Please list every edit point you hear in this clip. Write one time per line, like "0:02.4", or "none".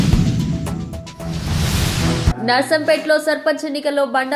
none

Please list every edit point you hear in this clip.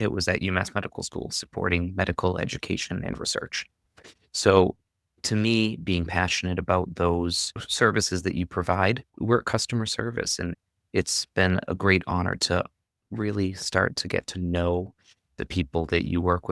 0:07.7
0:09.1
0:10.5

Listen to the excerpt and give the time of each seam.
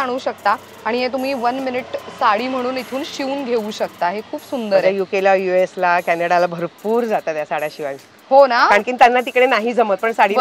none

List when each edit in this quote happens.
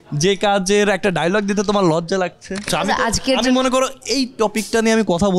0:02.7

